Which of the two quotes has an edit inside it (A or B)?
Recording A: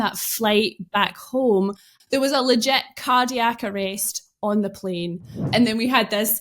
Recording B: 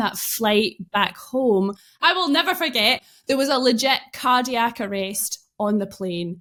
A